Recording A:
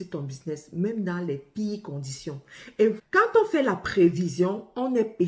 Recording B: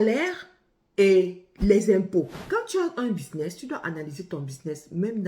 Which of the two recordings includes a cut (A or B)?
B